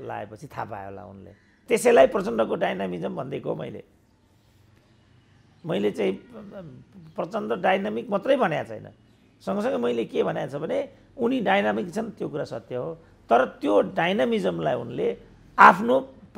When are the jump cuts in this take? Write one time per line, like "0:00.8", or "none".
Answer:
0:01.6

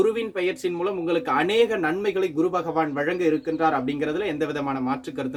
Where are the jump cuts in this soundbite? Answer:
none

